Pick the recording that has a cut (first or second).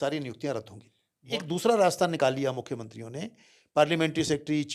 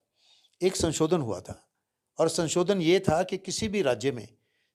first